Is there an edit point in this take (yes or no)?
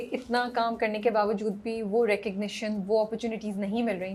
no